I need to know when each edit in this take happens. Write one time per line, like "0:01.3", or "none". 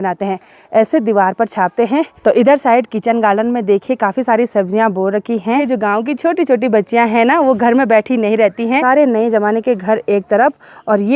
0:02.1
0:05.6
0:08.8